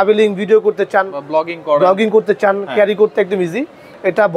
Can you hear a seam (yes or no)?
no